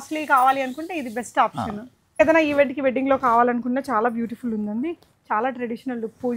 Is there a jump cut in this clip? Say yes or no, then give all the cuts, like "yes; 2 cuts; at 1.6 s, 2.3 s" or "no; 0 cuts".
yes; 1 cut; at 2.2 s